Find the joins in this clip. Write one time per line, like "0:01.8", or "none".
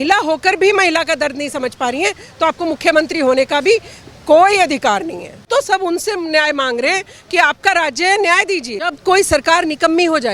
0:05.4
0:08.9